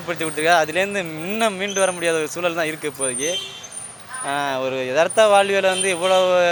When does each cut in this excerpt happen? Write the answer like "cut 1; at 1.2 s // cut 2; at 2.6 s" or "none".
none